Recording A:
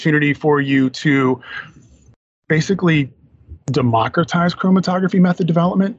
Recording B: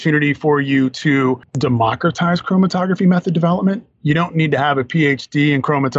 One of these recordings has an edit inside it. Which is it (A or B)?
B